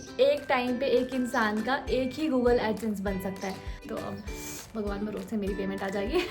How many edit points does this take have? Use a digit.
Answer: 1